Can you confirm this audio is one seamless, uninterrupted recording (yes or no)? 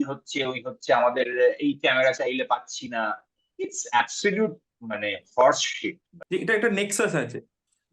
no